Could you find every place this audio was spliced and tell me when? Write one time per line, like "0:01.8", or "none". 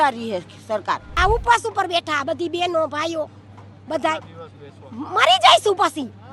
0:01.1